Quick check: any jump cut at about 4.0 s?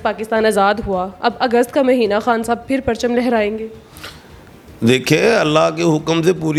no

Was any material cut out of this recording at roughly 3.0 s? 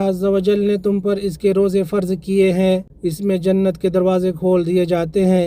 yes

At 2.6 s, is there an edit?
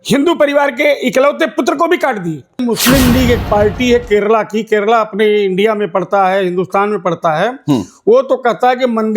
yes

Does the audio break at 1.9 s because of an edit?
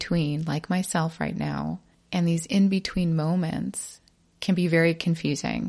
yes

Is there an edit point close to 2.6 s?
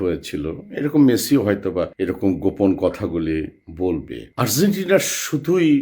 no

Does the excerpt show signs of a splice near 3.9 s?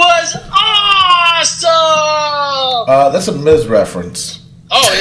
no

